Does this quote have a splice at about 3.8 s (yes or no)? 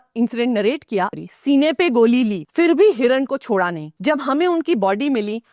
yes